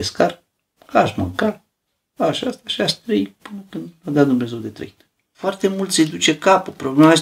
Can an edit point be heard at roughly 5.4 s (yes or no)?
yes